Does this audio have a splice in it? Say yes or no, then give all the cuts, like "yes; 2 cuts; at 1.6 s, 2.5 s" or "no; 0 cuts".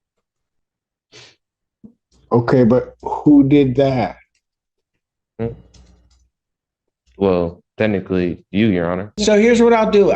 yes; 1 cut; at 9.0 s